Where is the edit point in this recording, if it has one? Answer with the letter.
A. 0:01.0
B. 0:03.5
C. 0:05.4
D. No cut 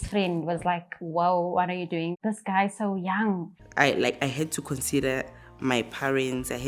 B